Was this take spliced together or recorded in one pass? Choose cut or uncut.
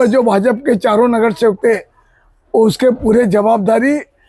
uncut